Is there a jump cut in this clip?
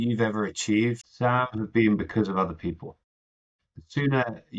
yes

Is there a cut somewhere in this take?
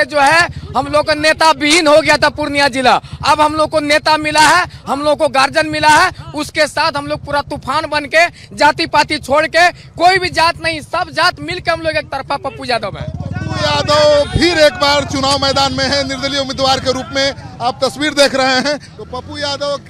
no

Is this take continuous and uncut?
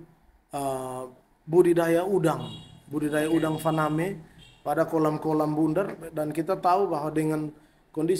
yes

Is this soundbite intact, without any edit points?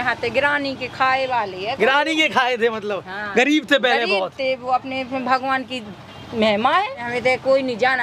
no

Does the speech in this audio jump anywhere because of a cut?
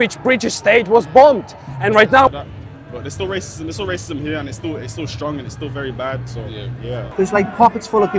yes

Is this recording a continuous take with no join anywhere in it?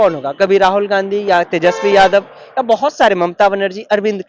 yes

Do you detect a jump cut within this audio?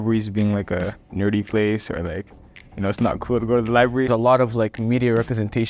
yes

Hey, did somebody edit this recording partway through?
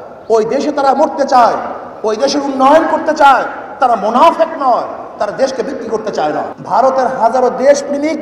yes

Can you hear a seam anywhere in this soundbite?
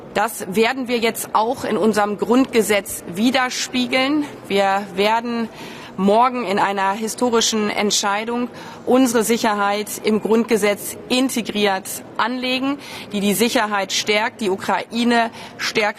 yes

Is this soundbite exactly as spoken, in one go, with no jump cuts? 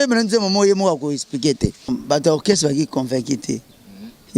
no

